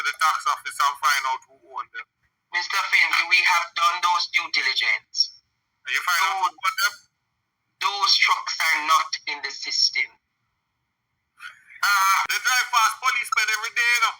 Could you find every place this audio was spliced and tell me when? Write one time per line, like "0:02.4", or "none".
0:12.2